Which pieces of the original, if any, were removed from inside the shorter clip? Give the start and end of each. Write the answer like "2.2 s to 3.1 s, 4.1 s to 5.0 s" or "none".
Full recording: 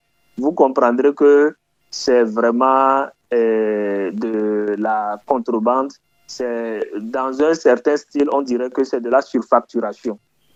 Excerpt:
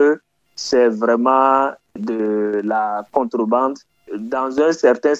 3.3 s to 4.1 s, 6.2 s to 6.9 s

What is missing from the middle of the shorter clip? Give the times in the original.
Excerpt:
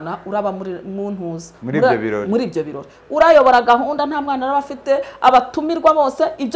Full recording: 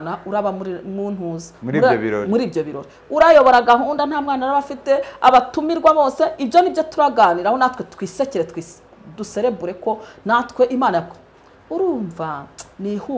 none

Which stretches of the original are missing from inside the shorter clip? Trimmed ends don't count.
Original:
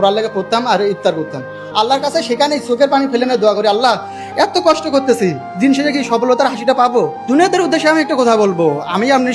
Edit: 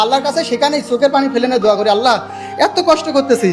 none

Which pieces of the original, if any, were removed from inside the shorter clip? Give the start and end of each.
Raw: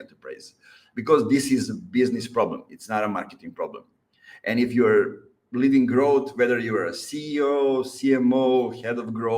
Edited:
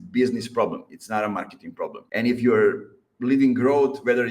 3.8 s to 4.3 s

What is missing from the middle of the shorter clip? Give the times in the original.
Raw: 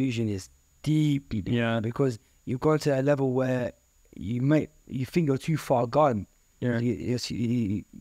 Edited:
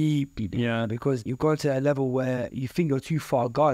2.2 s to 2.5 s, 3.8 s to 4.9 s

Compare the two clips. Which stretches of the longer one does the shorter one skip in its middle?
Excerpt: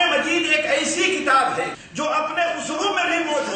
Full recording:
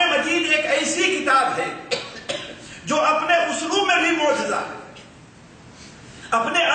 1.8 s to 2.7 s

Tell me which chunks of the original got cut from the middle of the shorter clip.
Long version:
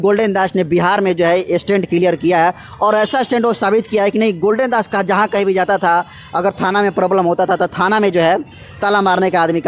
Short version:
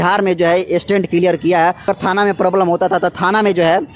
2.6 s to 6.4 s

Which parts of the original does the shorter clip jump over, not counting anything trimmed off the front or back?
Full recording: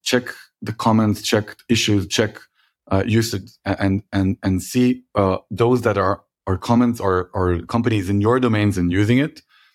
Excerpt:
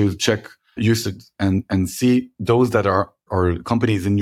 2.9 s to 3.7 s, 5.1 s to 5.4 s, 6.4 s to 7.3 s

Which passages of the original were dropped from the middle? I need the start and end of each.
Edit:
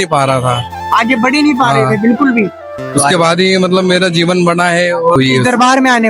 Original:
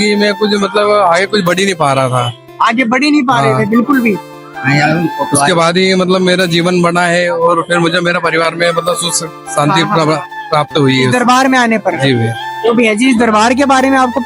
4.5 s to 5.2 s, 7.5 s to 10.8 s

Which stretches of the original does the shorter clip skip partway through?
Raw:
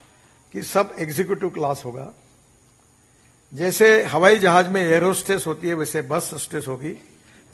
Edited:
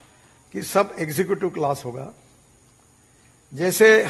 none

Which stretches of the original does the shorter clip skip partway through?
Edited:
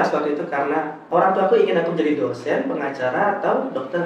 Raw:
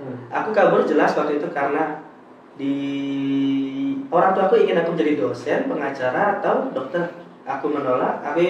2.0 s to 4.0 s

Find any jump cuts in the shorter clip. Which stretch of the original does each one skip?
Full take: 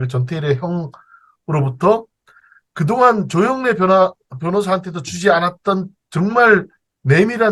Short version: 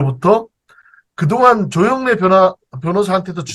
none

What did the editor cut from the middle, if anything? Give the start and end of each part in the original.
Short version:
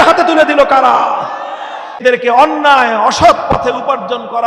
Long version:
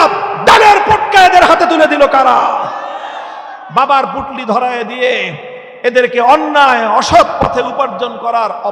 3.4 s to 5.9 s

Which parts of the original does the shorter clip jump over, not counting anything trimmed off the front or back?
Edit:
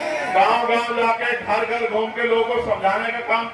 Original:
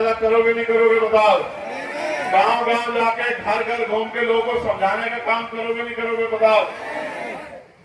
none

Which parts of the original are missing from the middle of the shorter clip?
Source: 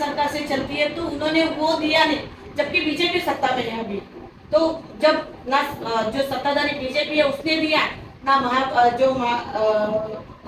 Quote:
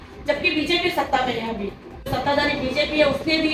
4.4 s to 6.3 s

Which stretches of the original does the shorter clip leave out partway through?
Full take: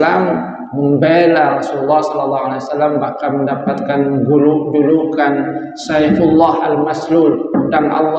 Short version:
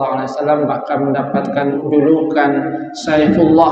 4.1 s to 4.6 s

